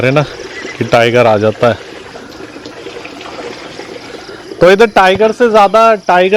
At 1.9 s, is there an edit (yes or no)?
no